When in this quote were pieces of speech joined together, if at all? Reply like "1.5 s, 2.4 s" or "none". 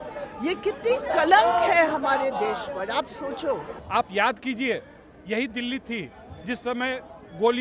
3.7 s